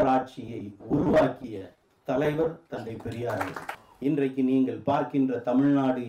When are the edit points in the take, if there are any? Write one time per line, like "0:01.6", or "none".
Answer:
0:03.7